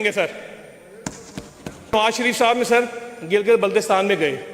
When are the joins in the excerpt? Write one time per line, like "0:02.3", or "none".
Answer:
0:01.9